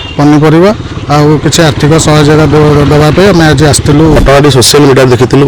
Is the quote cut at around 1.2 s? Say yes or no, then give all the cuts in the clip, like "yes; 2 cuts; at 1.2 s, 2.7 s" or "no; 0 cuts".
no; 1 cut; at 4.2 s